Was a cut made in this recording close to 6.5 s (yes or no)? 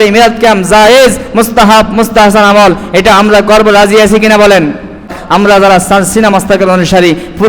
no